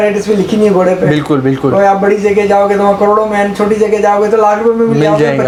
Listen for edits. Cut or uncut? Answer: uncut